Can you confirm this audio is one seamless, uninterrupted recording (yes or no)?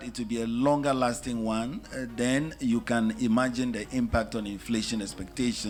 yes